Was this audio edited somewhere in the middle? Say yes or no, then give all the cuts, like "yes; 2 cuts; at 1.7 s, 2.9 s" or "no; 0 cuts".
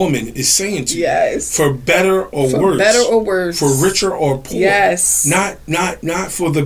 no; 0 cuts